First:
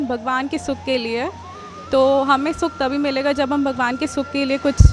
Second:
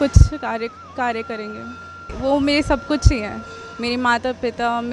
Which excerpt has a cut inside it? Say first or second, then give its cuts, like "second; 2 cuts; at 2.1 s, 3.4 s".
second; 1 cut; at 2.0 s